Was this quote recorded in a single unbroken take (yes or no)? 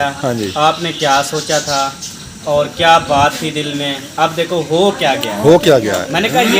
yes